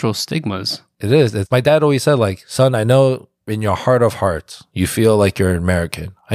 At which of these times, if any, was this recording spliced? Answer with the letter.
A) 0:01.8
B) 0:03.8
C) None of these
C